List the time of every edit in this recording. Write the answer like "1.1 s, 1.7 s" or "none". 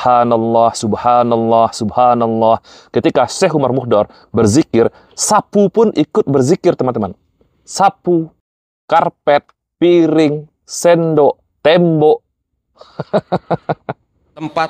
none